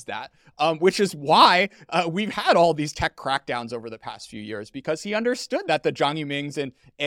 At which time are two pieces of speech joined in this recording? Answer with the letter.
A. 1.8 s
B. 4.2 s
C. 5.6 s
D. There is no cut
C